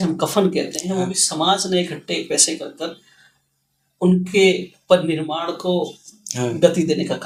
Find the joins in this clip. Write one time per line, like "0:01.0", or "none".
none